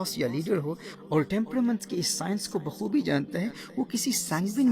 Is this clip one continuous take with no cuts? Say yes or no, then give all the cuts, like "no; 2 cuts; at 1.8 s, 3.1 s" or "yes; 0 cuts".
yes; 0 cuts